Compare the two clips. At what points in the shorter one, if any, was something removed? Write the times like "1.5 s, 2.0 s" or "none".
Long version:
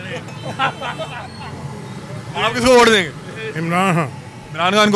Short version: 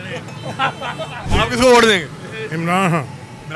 1.2 s